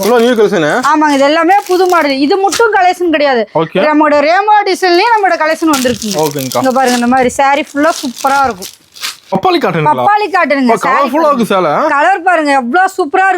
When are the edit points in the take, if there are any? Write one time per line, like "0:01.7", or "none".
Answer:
0:09.3